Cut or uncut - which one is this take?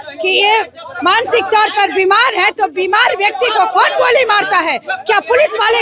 uncut